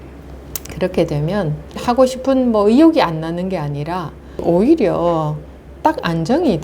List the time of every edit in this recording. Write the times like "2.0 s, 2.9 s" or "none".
1.8 s, 4.4 s